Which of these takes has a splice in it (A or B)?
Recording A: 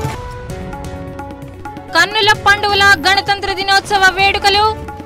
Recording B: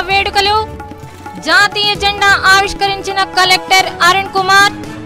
A